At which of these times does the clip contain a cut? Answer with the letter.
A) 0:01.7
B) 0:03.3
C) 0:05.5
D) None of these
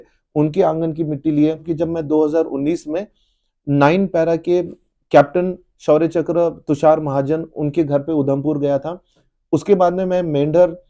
A